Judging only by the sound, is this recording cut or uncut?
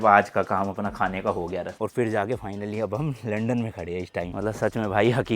cut